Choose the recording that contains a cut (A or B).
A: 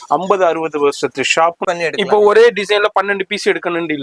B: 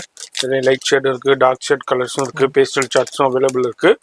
A